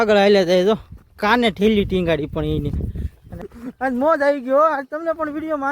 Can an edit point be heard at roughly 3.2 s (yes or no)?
yes